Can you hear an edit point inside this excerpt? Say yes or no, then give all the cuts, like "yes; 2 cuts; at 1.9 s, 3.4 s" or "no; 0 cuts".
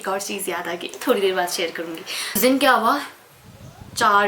yes; 1 cut; at 2.4 s